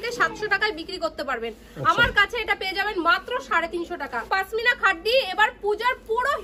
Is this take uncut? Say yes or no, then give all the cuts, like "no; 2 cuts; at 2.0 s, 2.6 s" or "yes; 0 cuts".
no; 1 cut; at 4.2 s